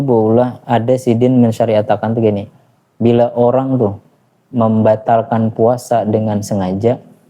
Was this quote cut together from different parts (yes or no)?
no